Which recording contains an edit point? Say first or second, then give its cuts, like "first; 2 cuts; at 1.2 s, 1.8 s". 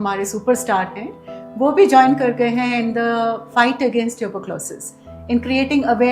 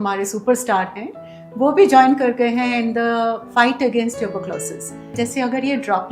second; 1 cut; at 5.2 s